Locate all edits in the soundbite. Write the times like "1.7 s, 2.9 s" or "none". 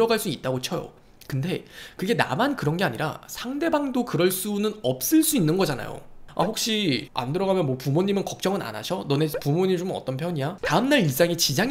6.2 s, 10.6 s